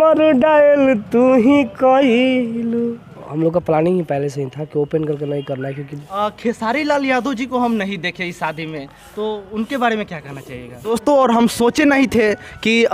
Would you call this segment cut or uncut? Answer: cut